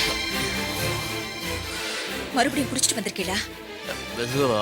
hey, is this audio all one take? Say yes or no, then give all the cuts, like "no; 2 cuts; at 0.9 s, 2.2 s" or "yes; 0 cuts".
yes; 0 cuts